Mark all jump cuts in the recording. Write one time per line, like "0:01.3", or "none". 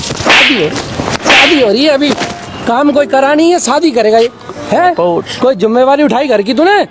none